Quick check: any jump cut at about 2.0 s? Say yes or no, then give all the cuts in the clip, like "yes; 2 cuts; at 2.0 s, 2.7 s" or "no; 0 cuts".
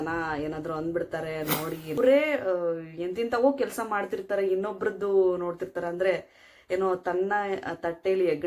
yes; 1 cut; at 2.0 s